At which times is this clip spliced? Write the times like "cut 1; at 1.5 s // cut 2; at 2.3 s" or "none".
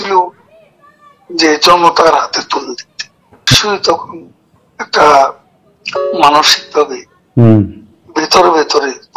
cut 1; at 3.5 s